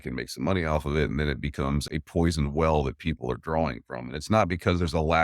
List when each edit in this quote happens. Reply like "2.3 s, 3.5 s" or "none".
1.8 s